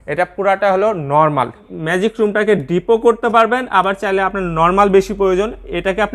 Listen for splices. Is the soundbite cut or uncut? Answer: cut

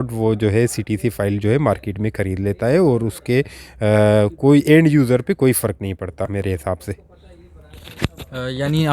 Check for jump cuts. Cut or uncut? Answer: uncut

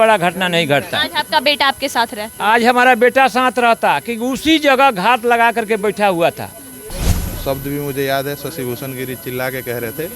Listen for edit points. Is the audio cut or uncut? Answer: cut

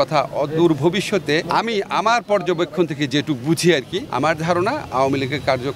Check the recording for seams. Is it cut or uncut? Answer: uncut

